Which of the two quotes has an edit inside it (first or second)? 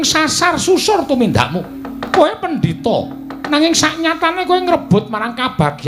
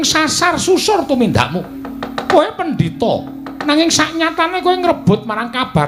first